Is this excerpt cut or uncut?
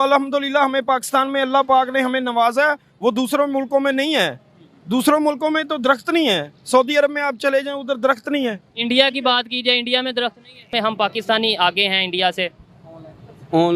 cut